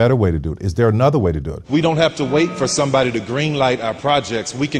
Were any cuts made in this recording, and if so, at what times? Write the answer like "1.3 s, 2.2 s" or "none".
1.5 s